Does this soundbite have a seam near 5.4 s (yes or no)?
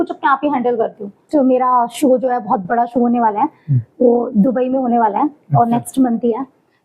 no